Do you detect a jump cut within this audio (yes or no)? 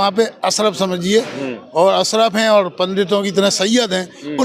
no